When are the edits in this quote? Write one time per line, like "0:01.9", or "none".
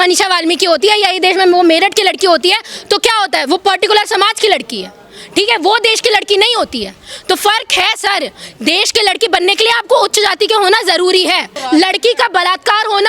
0:11.5